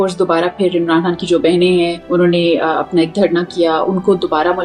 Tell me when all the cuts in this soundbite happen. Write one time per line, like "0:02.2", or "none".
0:02.0